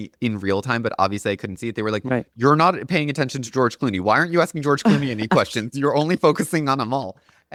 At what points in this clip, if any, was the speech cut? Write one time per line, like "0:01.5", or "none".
none